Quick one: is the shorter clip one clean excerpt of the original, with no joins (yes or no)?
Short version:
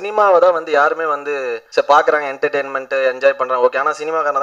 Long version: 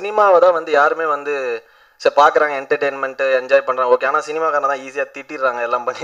no